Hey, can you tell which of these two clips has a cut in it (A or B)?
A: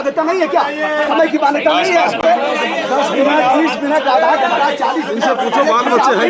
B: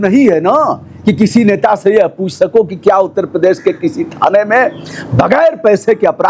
A